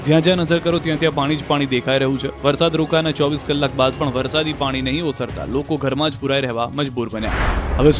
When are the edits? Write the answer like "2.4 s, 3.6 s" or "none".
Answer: none